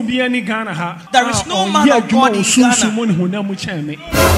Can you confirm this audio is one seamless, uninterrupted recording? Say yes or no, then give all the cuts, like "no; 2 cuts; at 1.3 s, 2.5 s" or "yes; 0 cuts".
no; 1 cut; at 1.0 s